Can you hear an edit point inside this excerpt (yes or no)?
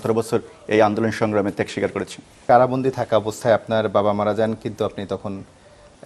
yes